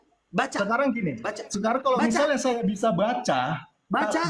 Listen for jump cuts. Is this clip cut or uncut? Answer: uncut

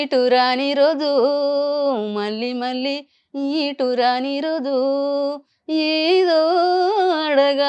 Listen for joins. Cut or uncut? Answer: uncut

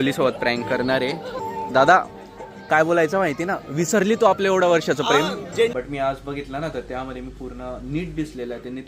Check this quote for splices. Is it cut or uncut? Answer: cut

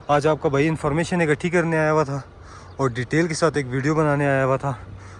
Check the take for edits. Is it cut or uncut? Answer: uncut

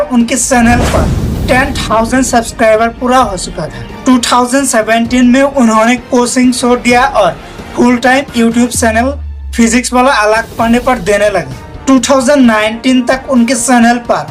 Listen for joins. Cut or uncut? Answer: uncut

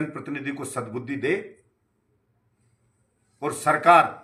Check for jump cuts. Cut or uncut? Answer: uncut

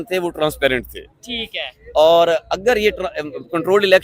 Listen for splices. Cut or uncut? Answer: uncut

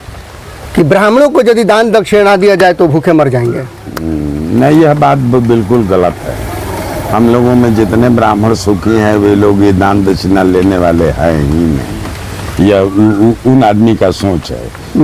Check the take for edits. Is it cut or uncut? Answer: uncut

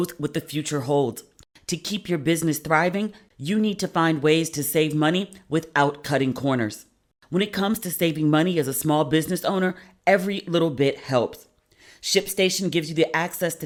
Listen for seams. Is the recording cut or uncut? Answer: uncut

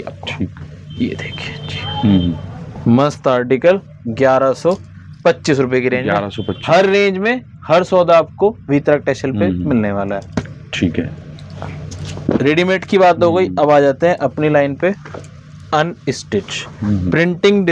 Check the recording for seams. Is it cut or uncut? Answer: uncut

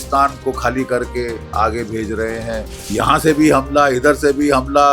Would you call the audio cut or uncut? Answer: cut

